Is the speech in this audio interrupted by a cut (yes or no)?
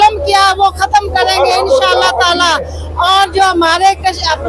no